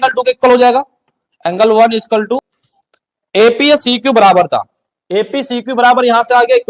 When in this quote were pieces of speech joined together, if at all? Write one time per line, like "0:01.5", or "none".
0:02.4